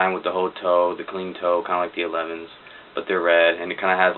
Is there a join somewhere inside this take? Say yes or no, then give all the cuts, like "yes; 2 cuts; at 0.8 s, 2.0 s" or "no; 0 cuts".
yes; 1 cut; at 2.7 s